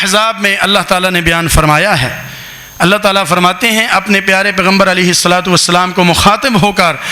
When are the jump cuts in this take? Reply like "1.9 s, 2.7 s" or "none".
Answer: none